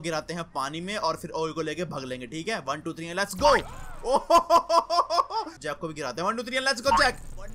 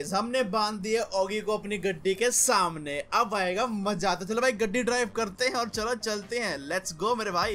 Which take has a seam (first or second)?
first